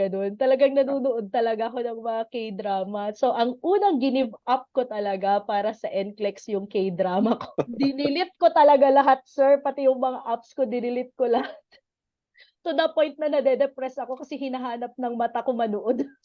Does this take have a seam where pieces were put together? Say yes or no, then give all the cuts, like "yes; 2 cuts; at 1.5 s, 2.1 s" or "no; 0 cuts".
no; 0 cuts